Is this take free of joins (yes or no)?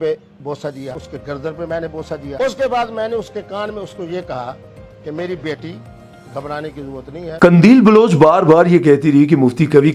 no